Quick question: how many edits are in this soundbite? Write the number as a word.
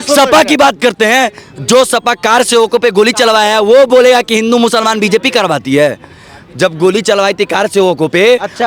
zero